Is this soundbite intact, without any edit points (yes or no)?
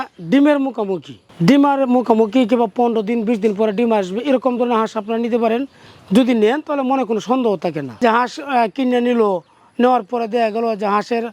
no